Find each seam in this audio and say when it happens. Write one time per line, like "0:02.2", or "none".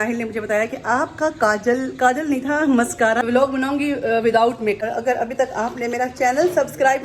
0:03.2
0:04.8